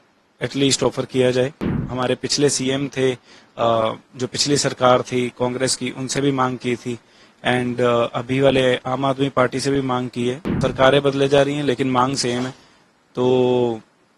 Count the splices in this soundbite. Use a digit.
2